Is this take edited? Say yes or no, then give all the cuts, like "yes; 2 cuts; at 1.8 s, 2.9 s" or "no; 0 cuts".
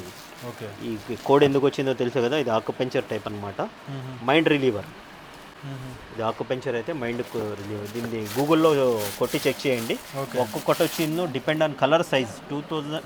no; 0 cuts